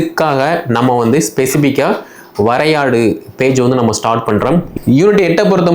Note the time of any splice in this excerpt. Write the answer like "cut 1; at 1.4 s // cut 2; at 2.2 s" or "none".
cut 1; at 4.7 s